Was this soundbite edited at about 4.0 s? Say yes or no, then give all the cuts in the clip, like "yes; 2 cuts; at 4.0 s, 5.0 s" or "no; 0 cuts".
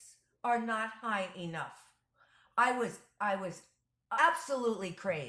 yes; 1 cut; at 4.0 s